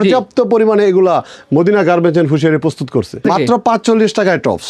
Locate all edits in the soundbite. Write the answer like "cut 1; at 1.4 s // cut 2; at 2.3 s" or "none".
cut 1; at 3.2 s